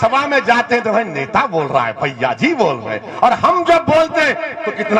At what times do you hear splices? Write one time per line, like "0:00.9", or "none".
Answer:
none